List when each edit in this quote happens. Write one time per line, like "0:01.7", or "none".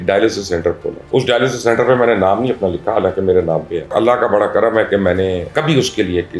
0:01.0
0:03.9
0:05.5